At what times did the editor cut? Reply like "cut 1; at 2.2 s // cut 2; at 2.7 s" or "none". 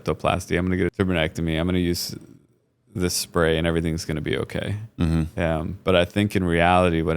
cut 1; at 0.9 s